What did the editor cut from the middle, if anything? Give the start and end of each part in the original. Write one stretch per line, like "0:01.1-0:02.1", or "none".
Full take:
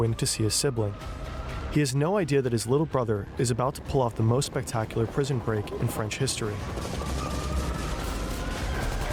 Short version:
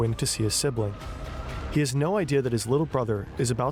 none